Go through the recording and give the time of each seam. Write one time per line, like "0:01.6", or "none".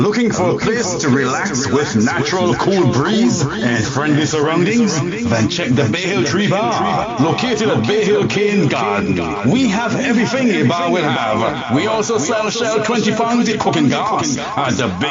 none